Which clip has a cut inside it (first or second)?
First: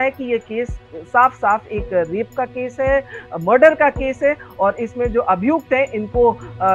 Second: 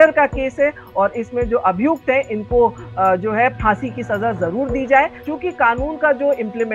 second